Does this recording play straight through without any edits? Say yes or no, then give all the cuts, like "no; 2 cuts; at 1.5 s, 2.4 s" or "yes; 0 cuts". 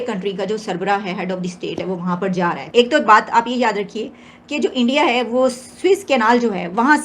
no; 1 cut; at 2.6 s